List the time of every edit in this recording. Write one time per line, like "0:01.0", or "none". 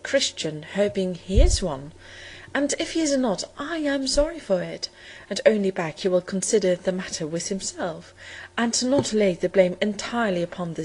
0:04.3